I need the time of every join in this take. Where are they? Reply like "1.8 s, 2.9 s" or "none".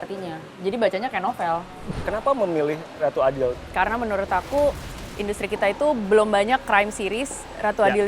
1.7 s, 3.6 s